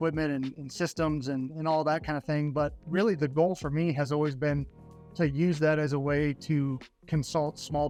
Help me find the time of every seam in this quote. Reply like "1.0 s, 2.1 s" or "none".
none